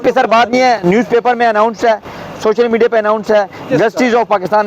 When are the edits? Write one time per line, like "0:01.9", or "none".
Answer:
none